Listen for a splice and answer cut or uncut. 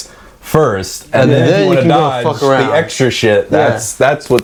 uncut